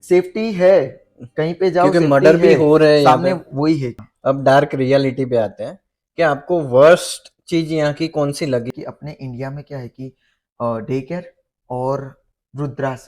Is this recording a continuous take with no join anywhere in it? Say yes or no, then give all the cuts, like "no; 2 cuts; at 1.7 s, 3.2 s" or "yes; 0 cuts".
no; 2 cuts; at 3.9 s, 8.7 s